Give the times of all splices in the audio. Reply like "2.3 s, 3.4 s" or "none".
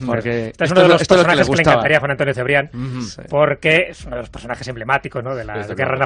2.6 s